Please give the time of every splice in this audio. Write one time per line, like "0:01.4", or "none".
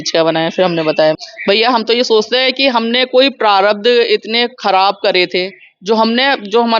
0:01.2